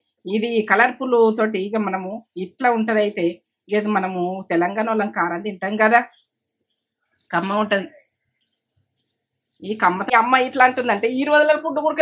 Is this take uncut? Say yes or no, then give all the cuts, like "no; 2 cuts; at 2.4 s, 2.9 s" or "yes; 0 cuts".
no; 1 cut; at 9.7 s